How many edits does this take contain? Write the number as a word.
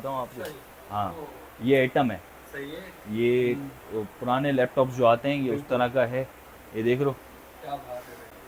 zero